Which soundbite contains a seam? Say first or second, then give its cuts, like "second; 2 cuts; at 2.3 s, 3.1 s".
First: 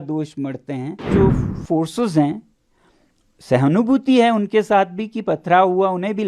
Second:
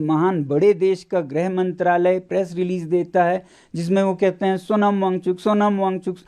first; 1 cut; at 1.1 s